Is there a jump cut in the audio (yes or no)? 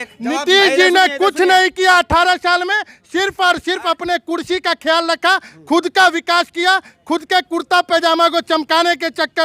no